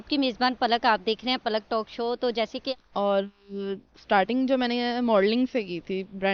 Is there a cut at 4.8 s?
no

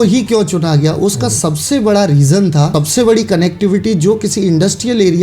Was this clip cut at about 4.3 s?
no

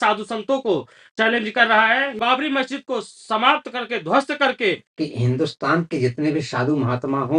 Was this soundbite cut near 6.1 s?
no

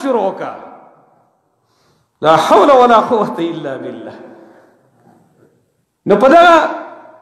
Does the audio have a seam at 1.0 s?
no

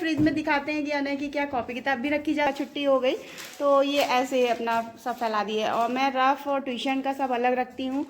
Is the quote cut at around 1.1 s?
no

